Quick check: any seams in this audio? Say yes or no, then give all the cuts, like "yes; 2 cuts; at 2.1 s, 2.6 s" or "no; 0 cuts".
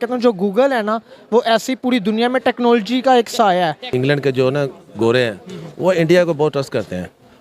yes; 1 cut; at 3.8 s